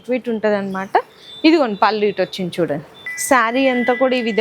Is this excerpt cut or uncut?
cut